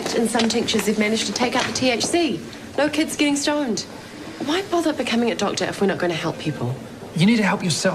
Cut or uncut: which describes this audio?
uncut